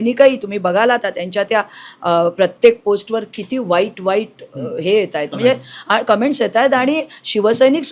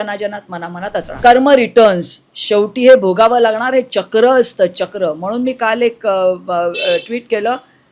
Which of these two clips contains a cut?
second; 1 cut; at 1.1 s

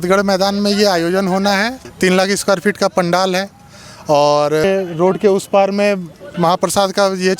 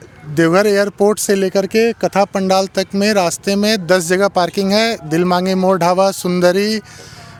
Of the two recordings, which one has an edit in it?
first; 2 cuts; at 1.8 s, 4.6 s

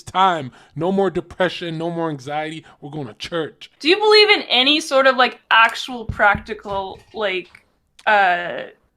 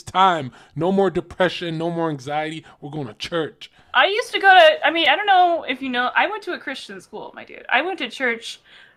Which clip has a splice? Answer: first; 1 cut; at 3.7 s

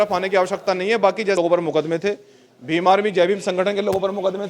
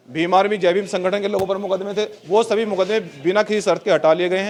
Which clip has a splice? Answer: first; 1 cut; at 1.4 s

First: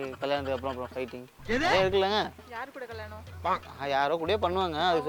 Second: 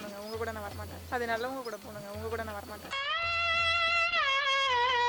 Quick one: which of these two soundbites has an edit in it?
second; 1 cut; at 1.0 s

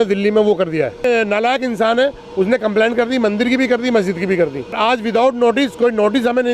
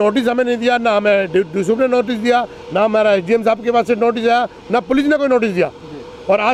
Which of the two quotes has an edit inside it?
first; 2 cuts; at 1.0 s, 4.8 s

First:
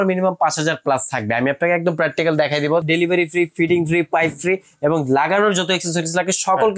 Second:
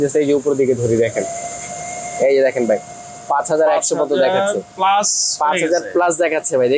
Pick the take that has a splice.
first; 1 cut; at 2.8 s

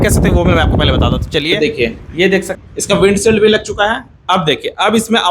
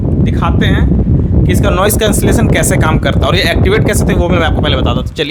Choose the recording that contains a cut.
first; 1 cut; at 2.6 s

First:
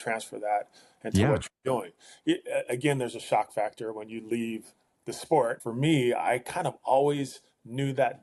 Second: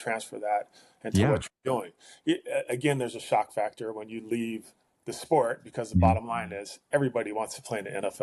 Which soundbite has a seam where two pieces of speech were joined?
first; 1 cut; at 5.6 s

